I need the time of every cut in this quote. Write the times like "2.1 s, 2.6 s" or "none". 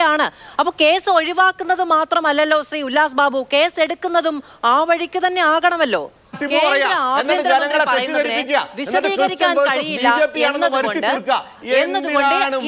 6.4 s